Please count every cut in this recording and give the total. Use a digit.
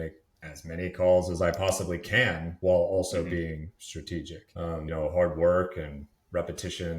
1